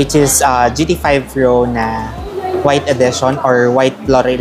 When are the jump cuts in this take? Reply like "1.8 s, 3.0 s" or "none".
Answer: none